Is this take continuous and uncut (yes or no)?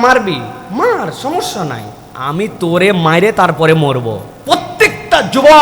no